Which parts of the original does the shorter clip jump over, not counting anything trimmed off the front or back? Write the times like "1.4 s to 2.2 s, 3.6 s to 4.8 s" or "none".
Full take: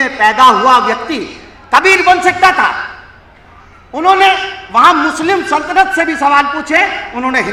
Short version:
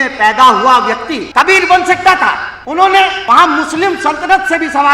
1.2 s to 1.5 s, 2.9 s to 3.8 s, 4.5 s to 4.7 s

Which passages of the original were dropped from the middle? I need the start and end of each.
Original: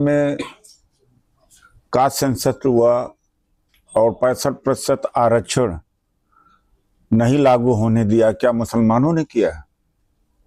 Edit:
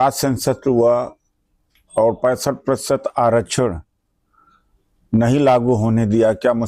none

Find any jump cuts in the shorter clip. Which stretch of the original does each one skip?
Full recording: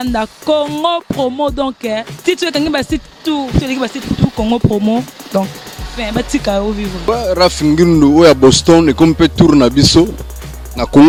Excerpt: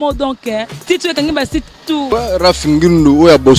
3.4 s to 7.0 s

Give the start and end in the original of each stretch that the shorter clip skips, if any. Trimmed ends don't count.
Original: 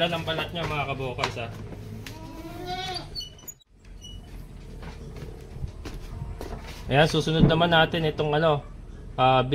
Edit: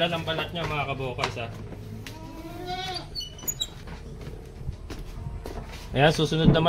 3.8 s to 4.8 s

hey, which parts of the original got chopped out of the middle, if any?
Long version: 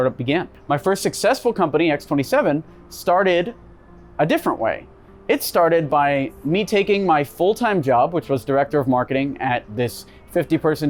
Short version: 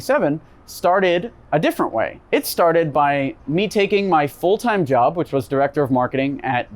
3.6 s to 4.0 s, 4.8 s to 5.1 s

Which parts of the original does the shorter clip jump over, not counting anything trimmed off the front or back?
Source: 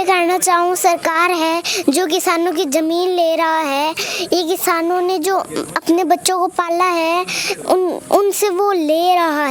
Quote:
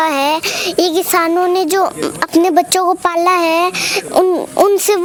none

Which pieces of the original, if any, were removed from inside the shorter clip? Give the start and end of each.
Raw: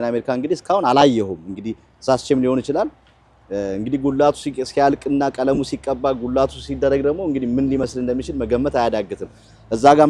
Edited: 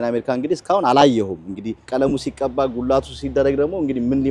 1.9 s to 5.3 s

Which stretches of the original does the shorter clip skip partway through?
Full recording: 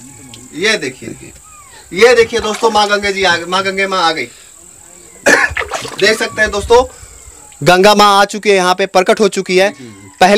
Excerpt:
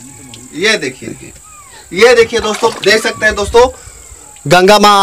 2.7 s to 5.9 s

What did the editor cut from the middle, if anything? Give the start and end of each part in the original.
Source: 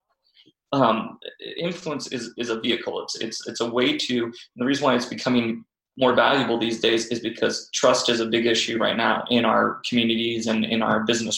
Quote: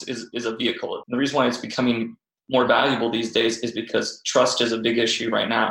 3.1 s to 4.5 s

